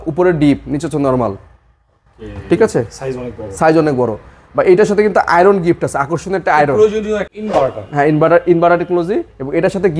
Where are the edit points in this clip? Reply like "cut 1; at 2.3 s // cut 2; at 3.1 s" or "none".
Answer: cut 1; at 7.3 s